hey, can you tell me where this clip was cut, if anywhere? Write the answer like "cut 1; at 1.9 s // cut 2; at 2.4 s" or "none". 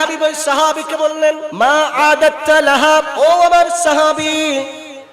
cut 1; at 1.5 s // cut 2; at 3.1 s